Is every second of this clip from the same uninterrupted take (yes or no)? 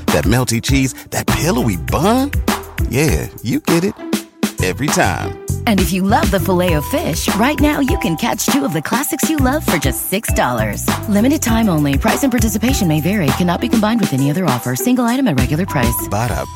yes